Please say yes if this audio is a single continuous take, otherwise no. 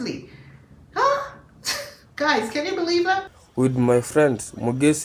no